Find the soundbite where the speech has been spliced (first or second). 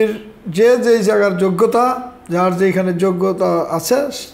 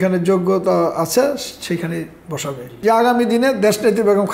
second